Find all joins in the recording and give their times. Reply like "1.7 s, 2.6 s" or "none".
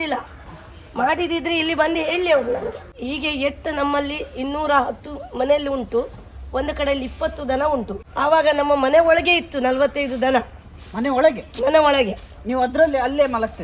2.9 s, 8.0 s

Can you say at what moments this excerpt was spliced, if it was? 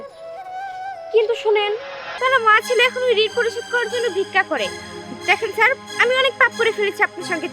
2.0 s

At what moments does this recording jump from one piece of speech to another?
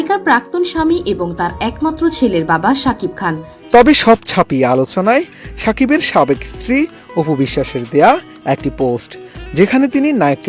3.5 s

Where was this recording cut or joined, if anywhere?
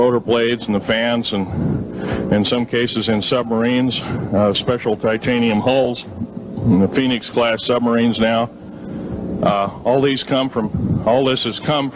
7.0 s

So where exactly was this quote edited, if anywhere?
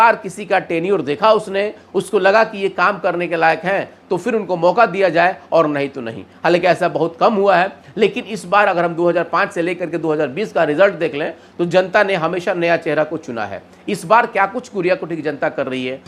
none

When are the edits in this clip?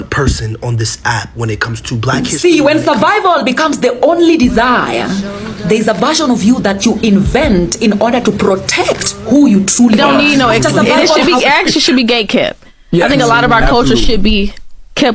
2.2 s, 10.0 s

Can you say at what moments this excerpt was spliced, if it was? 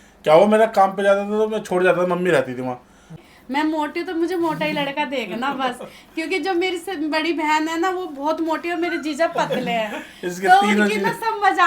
3.2 s

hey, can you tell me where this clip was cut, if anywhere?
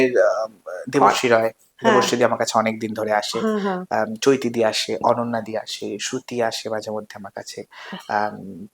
none

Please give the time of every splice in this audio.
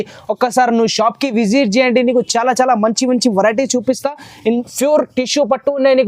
4.7 s

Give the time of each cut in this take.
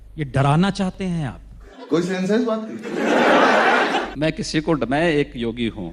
none

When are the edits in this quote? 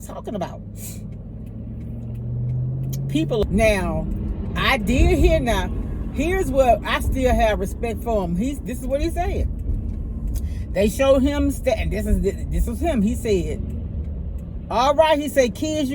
3.4 s

